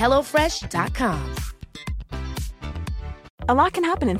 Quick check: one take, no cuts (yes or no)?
no